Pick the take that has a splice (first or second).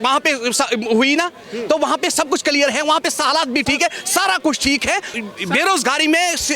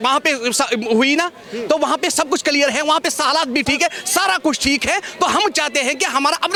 first